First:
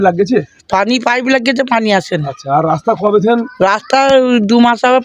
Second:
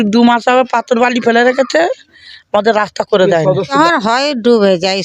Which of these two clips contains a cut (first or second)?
second